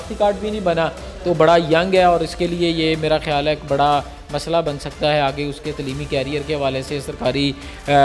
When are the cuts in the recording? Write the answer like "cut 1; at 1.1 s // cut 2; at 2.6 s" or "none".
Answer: none